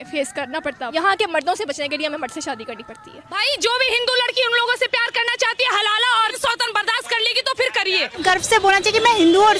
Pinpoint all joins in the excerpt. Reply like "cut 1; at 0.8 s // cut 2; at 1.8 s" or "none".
cut 1; at 0.9 s // cut 2; at 3.4 s // cut 3; at 6.4 s // cut 4; at 8.2 s